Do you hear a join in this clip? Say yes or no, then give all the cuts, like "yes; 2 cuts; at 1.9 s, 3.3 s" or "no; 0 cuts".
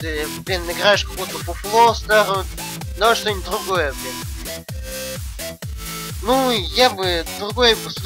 yes; 1 cut; at 4.0 s